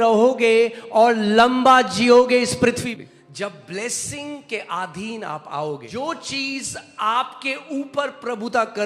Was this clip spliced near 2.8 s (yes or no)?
yes